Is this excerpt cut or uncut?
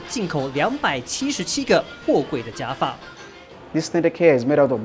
uncut